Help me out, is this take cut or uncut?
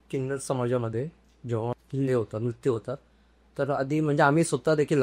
uncut